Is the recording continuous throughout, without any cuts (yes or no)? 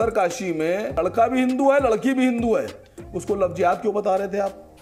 yes